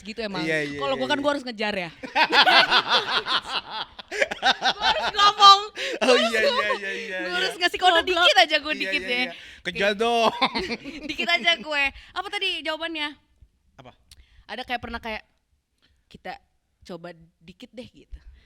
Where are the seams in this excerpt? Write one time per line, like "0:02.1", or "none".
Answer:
none